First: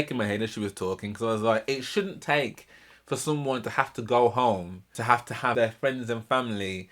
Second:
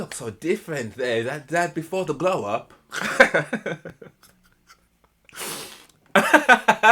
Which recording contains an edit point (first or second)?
first